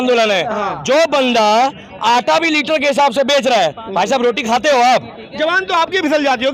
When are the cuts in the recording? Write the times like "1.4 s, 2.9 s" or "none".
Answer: none